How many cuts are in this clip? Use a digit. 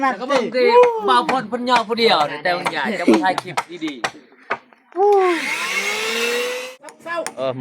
1